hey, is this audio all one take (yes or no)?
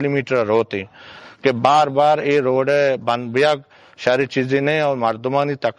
no